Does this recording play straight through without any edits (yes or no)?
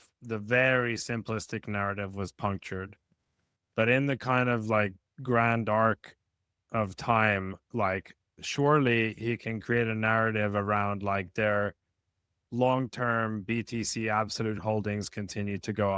yes